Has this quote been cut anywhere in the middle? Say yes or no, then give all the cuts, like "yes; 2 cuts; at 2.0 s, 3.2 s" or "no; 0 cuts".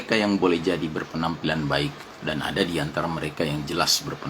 yes; 1 cut; at 2.1 s